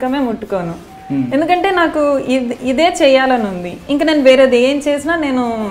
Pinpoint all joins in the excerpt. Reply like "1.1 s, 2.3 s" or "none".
none

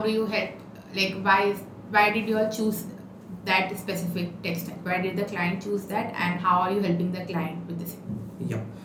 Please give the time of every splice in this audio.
none

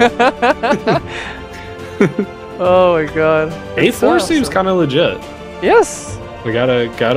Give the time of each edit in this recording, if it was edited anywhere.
3.6 s

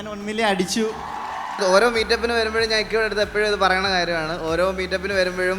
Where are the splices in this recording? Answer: 1.3 s

